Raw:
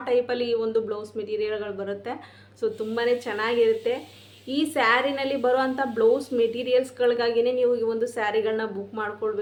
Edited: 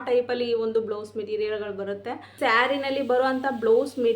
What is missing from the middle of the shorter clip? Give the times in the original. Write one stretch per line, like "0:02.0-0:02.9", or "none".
0:02.4-0:04.7